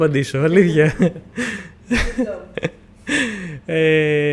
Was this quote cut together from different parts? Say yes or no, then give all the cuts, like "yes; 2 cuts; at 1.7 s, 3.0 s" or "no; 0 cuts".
no; 0 cuts